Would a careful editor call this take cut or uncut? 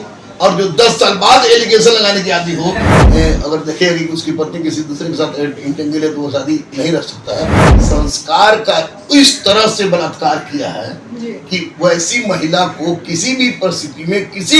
cut